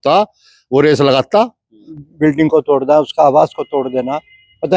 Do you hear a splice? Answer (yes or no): yes